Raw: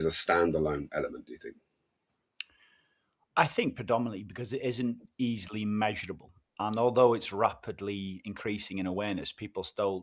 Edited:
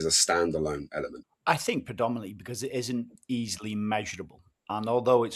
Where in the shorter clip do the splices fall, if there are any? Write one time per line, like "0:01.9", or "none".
0:01.3